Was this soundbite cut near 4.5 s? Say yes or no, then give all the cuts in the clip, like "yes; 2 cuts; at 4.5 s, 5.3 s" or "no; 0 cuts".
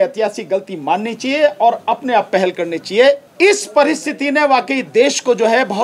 no; 1 cut; at 3.3 s